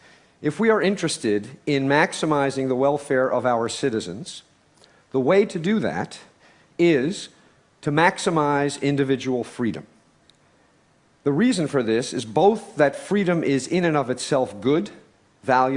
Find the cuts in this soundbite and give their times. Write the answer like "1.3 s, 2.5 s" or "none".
14.7 s